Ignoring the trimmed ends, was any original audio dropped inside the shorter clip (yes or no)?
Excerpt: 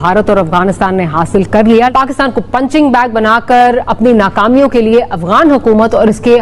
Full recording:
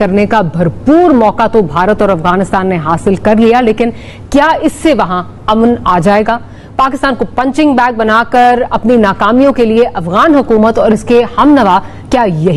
yes